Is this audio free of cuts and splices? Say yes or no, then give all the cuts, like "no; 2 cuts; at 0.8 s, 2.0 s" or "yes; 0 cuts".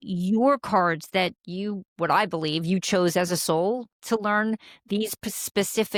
yes; 0 cuts